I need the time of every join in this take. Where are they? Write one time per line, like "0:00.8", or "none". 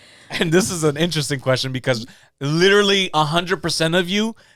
none

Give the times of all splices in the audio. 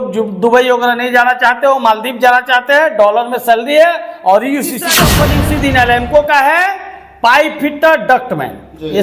0:05.0

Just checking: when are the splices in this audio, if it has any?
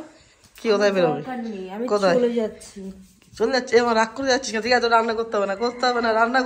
none

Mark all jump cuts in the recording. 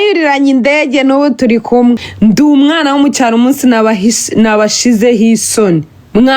0:02.1

